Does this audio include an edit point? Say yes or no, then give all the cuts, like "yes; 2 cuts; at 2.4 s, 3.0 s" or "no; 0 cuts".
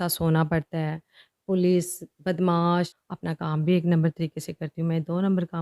yes; 1 cut; at 3.1 s